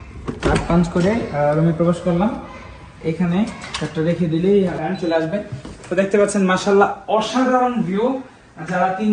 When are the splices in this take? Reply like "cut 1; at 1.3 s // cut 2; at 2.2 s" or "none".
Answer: cut 1; at 4.8 s